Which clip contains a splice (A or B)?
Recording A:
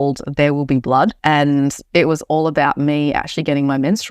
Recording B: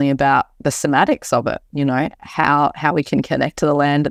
A